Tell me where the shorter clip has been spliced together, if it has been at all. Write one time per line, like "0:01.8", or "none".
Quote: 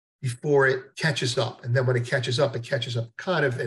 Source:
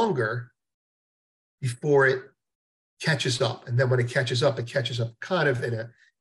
0:00.9